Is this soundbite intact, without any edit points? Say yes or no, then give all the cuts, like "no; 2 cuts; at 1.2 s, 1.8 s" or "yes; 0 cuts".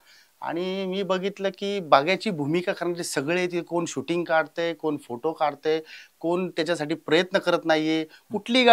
yes; 0 cuts